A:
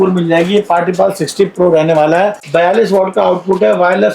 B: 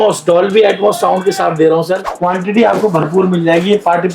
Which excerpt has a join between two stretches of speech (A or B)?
B